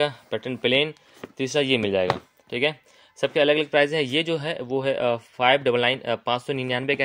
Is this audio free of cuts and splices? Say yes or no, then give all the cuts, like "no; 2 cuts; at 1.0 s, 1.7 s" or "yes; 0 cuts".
yes; 0 cuts